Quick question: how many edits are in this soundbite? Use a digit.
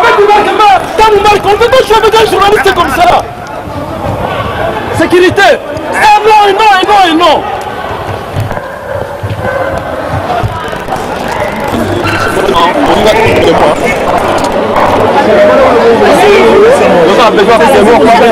0